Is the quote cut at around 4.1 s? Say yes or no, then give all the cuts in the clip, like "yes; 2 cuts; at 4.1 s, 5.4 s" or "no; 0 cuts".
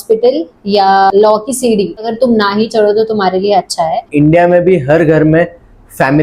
yes; 1 cut; at 4.1 s